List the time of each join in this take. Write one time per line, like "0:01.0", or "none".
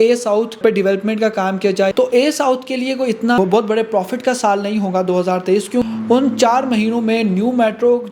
0:01.9
0:03.4
0:05.8